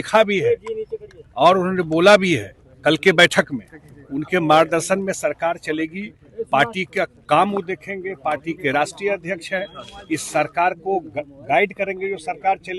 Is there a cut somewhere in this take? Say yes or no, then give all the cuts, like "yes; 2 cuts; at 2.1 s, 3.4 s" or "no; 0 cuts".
no; 0 cuts